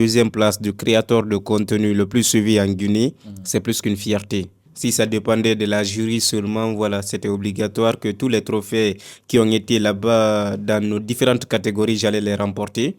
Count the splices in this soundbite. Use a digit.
1